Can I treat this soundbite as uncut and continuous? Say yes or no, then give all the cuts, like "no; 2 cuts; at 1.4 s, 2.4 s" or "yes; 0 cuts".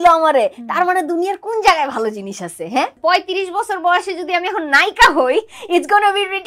no; 1 cut; at 2.9 s